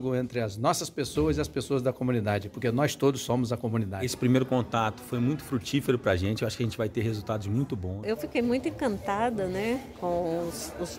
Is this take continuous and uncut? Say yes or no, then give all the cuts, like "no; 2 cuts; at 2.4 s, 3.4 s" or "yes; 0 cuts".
no; 2 cuts; at 4.1 s, 7.9 s